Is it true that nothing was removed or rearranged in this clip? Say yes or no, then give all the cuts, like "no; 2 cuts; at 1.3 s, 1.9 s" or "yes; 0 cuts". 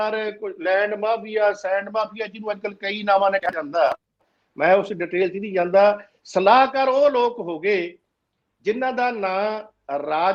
yes; 0 cuts